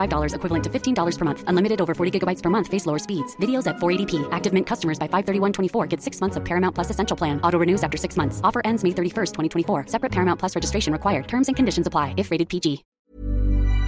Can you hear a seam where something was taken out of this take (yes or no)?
yes